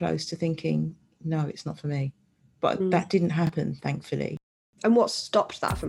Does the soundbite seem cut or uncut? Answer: cut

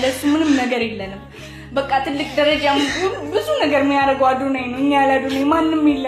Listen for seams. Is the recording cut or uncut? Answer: uncut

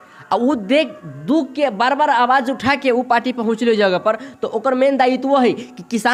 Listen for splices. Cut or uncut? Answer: uncut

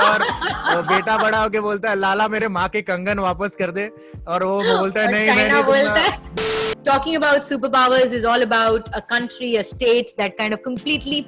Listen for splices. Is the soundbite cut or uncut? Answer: cut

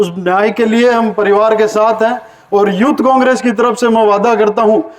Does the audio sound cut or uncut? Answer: uncut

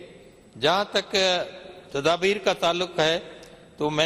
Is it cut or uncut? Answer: uncut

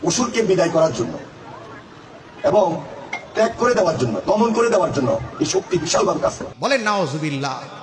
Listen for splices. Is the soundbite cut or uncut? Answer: uncut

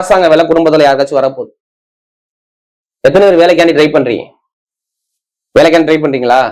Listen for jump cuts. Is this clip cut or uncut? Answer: uncut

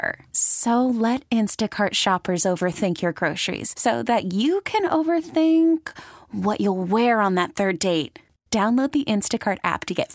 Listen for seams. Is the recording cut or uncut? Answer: uncut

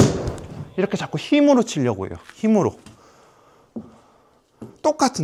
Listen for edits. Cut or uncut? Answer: uncut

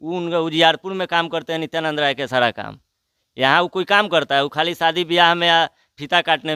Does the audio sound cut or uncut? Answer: uncut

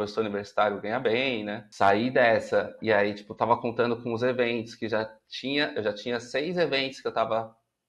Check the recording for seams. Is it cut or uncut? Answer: cut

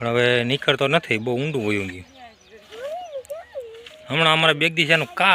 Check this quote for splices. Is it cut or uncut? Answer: uncut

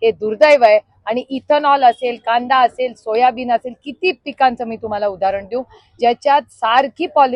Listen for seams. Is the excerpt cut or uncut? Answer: uncut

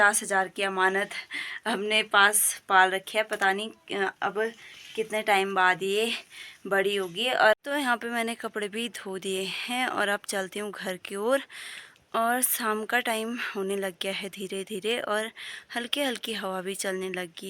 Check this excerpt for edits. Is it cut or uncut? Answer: cut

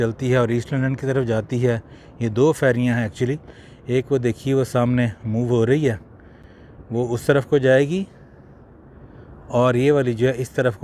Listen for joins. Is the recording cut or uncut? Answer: uncut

